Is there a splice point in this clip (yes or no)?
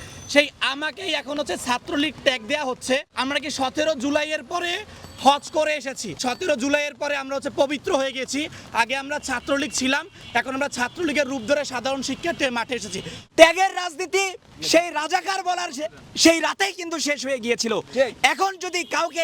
yes